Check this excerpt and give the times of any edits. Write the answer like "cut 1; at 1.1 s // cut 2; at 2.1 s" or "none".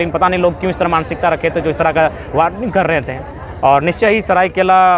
none

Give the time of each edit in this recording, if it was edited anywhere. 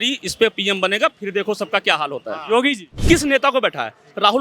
cut 1; at 2.9 s

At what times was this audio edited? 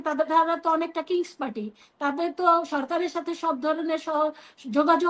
none

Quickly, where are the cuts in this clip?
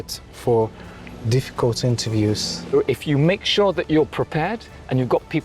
cut 1; at 2.7 s

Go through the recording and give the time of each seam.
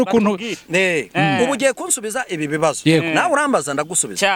none

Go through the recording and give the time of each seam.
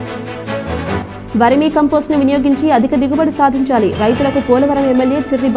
none

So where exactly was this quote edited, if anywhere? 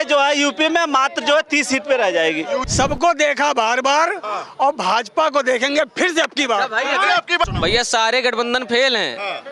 cut 1; at 2.7 s // cut 2; at 7.5 s

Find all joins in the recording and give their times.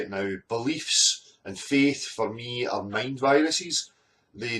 cut 1; at 2.4 s

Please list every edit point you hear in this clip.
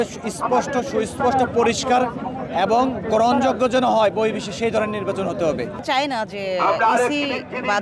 cut 1; at 5.8 s

